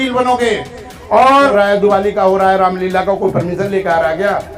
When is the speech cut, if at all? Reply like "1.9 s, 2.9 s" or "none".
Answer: 1.5 s